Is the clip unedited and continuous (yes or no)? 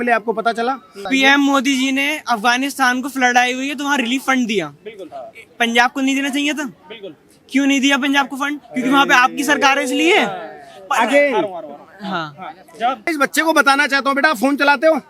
no